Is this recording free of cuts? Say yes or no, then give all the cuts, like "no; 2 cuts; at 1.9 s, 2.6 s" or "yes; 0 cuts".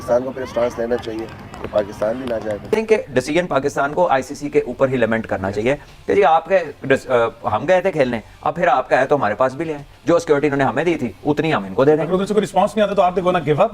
no; 1 cut; at 2.7 s